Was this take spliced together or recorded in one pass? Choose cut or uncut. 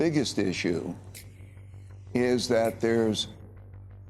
uncut